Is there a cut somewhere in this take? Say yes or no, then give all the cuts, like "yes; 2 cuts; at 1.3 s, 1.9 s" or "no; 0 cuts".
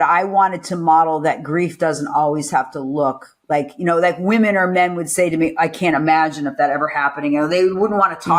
no; 0 cuts